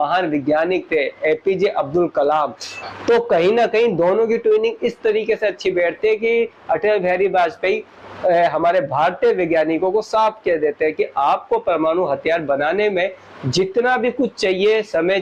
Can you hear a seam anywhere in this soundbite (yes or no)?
no